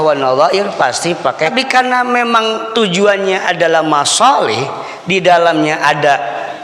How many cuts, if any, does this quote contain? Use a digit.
1